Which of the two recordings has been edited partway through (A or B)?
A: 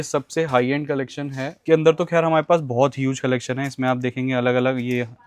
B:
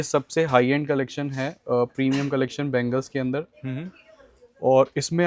A